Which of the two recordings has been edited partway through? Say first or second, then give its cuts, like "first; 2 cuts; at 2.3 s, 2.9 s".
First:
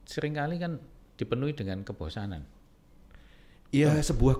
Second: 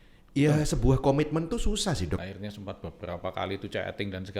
second; 1 cut; at 2.2 s